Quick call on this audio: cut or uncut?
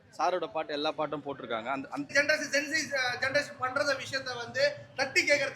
cut